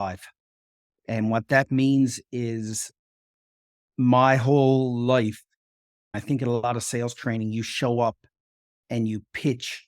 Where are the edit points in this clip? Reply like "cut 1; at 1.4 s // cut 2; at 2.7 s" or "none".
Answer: cut 1; at 6.2 s